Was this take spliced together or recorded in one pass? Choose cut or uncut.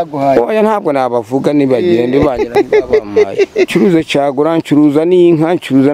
cut